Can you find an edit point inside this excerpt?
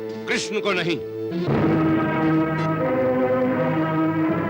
no; 0 cuts

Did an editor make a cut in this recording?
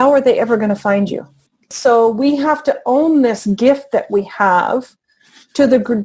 yes; 1 cut; at 1.7 s

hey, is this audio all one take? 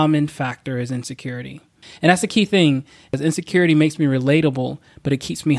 no; 2 cuts; at 1.9 s, 3.1 s

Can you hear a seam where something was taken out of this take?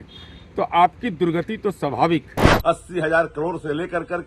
yes; 1 cut; at 2.4 s

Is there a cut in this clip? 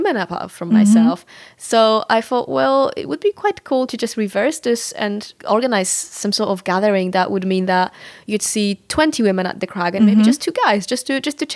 no; 0 cuts

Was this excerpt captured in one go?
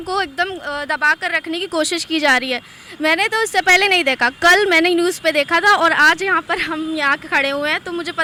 yes; 0 cuts

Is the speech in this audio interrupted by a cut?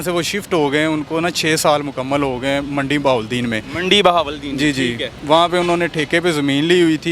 no; 0 cuts

